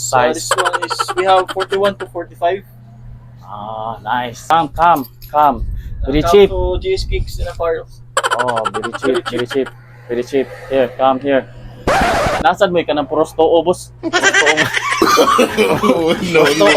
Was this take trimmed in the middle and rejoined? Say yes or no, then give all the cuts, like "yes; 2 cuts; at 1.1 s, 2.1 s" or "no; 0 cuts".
yes; 3 cuts; at 4.5 s, 12.4 s, 13.9 s